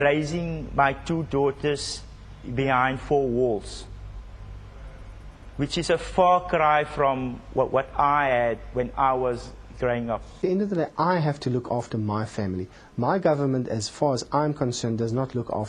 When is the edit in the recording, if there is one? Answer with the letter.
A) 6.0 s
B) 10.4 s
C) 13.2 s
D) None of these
B